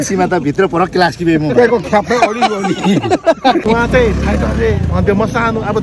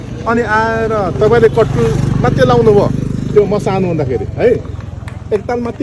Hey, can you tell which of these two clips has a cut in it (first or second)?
first